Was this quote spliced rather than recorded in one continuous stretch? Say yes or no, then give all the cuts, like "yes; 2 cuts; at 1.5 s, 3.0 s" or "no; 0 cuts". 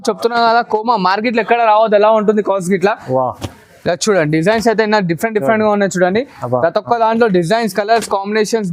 no; 0 cuts